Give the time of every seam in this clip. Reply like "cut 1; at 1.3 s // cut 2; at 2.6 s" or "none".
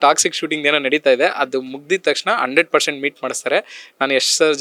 none